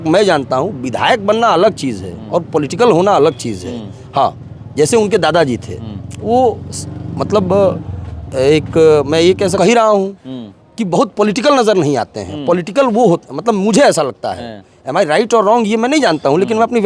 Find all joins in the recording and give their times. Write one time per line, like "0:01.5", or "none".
0:09.6